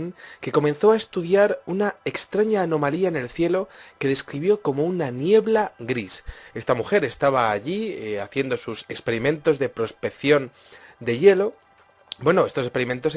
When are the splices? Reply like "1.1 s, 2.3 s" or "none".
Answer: none